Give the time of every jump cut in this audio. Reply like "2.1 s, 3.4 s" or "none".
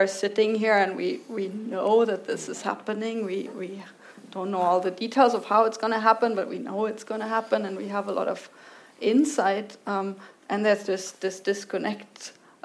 none